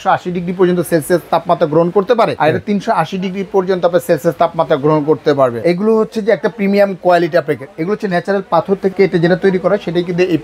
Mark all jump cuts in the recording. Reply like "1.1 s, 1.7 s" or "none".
2.3 s, 5.6 s, 8.9 s